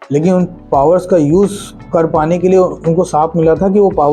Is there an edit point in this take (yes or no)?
yes